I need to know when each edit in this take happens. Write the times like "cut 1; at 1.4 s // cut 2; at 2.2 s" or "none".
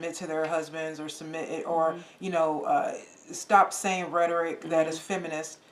none